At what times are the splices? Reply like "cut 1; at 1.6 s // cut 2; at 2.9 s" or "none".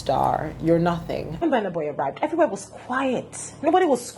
cut 1; at 1.4 s